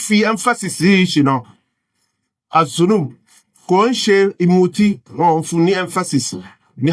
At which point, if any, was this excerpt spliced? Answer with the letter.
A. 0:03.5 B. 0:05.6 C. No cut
C